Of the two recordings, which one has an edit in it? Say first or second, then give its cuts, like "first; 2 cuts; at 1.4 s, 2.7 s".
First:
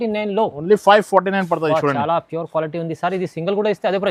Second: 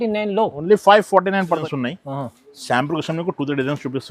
second; 1 cut; at 1.6 s